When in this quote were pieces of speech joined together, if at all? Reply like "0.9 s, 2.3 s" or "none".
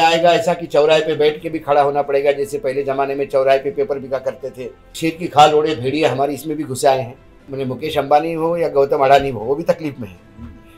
4.9 s, 7.5 s